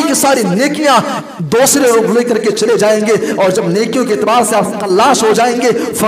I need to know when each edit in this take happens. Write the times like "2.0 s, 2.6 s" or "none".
none